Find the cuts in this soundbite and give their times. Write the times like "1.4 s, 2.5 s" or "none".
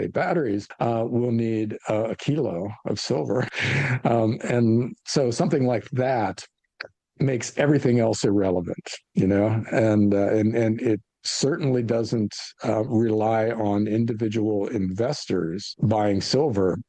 none